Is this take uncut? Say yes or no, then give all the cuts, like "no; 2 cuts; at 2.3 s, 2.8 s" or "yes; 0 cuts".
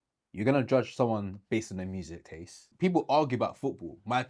no; 1 cut; at 2.7 s